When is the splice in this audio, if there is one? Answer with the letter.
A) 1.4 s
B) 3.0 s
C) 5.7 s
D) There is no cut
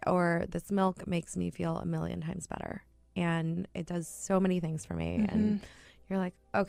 D